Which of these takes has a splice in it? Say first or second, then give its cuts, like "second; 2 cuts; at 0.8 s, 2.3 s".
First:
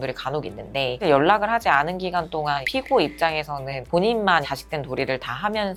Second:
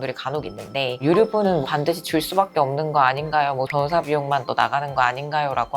second; 2 cuts; at 1.0 s, 3.7 s